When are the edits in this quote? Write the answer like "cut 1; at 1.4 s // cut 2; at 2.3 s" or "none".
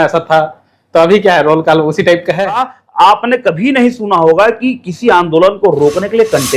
cut 1; at 2.8 s